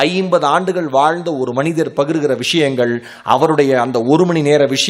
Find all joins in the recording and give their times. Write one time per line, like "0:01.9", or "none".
none